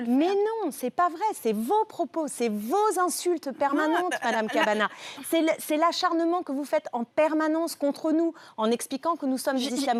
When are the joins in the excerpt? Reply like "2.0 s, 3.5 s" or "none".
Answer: none